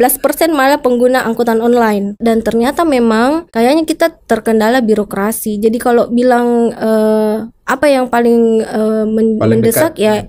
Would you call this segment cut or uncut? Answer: cut